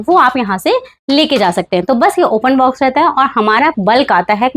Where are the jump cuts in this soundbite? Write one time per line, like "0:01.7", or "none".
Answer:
none